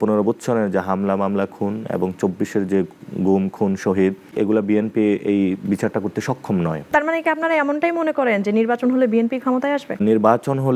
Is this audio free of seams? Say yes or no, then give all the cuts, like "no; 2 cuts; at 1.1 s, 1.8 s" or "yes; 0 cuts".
no; 3 cuts; at 4.3 s, 6.9 s, 10.0 s